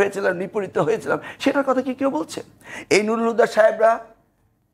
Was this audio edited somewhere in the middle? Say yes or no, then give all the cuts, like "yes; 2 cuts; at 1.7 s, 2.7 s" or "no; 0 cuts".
no; 0 cuts